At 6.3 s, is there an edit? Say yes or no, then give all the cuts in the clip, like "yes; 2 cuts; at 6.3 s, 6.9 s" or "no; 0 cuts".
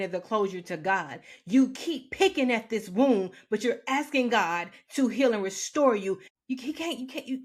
yes; 1 cut; at 6.3 s